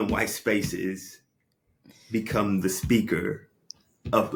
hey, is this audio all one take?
yes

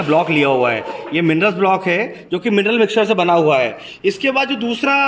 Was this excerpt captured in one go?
no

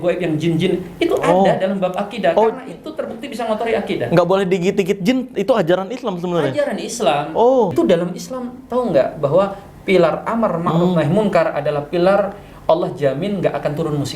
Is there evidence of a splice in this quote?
yes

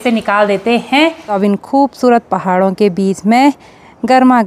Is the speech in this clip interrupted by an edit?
yes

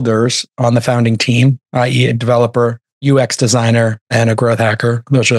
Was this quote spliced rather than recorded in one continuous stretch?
no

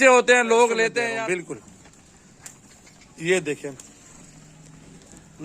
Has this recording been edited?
yes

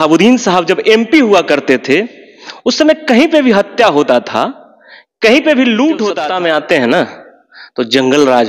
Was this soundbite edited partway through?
yes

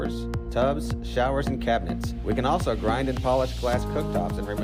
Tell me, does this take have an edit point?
no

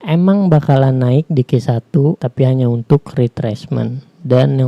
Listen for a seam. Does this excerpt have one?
yes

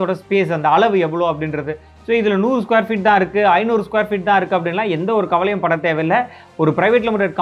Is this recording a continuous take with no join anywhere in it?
yes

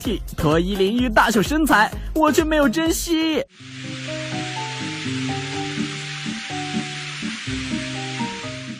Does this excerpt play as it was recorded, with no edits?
yes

